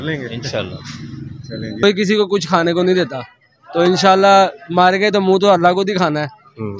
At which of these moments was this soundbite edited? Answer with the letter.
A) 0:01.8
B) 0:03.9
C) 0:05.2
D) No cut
A